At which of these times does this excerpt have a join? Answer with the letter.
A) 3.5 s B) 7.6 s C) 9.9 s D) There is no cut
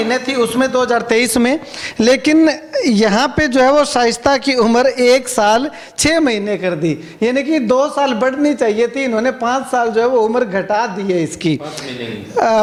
D